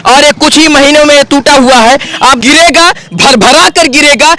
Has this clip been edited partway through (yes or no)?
yes